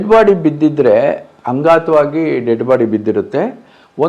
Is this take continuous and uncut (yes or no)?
yes